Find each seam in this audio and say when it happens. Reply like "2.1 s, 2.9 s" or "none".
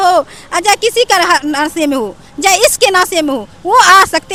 none